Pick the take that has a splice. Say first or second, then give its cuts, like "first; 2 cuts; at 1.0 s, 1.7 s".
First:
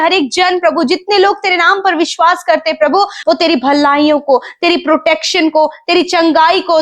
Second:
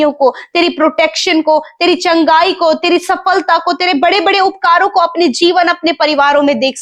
first; 1 cut; at 3.2 s